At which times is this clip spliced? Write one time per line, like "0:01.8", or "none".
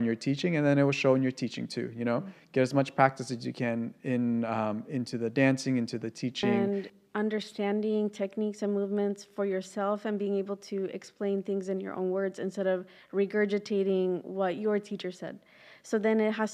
0:06.5